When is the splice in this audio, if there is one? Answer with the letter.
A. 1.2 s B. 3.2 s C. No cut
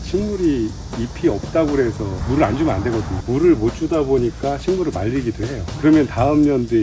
B